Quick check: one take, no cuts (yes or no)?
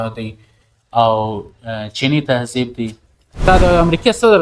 no